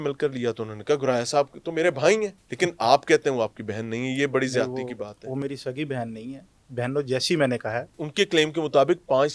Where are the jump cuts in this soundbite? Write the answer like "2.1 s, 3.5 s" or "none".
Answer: 2.4 s, 8.0 s